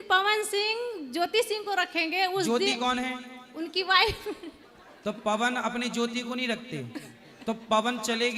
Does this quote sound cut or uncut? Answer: uncut